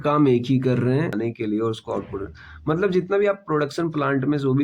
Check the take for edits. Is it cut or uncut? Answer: cut